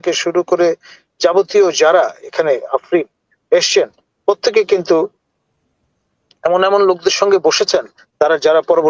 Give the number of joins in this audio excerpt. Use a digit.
0